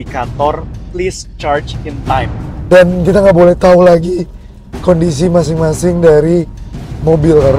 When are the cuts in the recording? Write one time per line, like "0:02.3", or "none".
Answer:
0:02.5